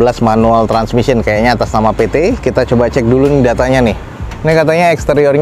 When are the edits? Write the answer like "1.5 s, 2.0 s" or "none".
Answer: none